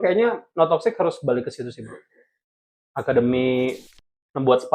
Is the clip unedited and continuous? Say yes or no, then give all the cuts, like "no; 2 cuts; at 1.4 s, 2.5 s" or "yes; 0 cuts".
no; 1 cut; at 3.8 s